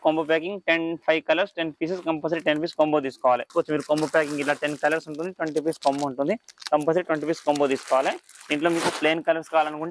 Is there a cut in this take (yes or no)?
yes